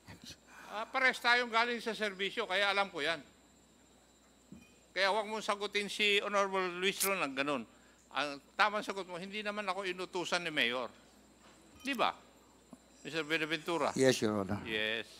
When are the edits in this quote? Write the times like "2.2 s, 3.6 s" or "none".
none